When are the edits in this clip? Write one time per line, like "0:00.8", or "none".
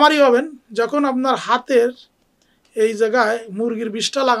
none